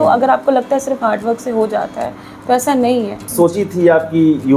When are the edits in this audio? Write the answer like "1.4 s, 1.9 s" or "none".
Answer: 3.2 s